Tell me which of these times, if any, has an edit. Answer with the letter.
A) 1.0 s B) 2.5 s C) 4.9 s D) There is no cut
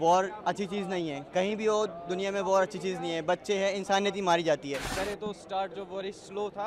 C